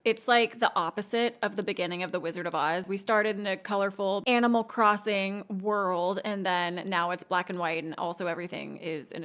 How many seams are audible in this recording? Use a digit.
2